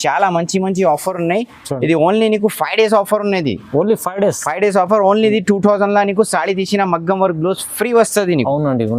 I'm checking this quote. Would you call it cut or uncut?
uncut